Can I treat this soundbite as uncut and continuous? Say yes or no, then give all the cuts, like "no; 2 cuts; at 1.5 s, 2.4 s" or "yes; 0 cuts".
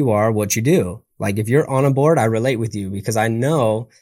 yes; 0 cuts